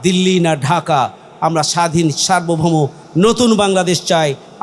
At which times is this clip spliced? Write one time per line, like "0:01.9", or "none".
none